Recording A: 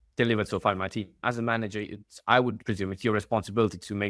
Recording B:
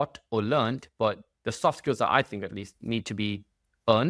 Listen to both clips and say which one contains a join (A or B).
A